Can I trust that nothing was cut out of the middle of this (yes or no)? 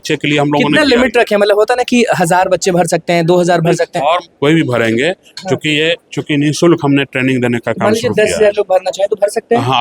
yes